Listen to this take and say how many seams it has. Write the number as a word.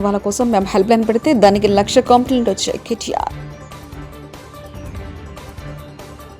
two